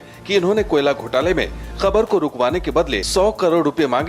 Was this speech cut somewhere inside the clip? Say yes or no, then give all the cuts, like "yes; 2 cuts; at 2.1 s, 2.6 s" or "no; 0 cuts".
yes; 1 cut; at 3.0 s